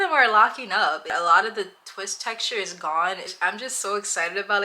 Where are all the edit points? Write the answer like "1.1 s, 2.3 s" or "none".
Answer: 1.1 s, 3.3 s